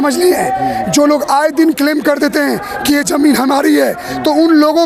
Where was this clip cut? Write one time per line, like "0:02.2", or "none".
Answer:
none